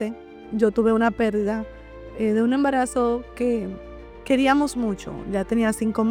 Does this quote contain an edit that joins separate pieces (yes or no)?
no